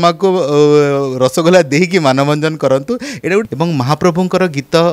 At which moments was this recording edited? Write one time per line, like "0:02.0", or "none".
0:03.5